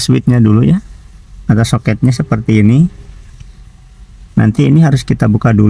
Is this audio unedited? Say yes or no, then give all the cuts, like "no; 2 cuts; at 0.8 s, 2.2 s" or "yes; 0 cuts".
yes; 0 cuts